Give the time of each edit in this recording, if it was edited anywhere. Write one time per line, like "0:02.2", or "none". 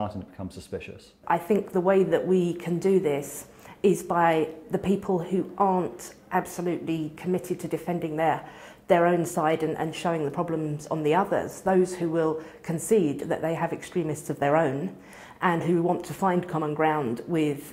0:01.2